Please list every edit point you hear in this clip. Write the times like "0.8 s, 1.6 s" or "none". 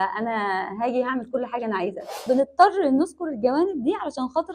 2.1 s